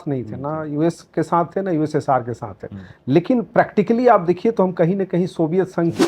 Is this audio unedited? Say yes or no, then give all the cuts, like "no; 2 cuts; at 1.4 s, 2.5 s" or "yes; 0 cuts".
yes; 0 cuts